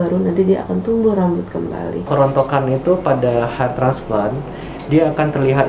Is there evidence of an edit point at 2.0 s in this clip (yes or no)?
yes